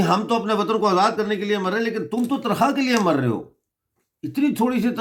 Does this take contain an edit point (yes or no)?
no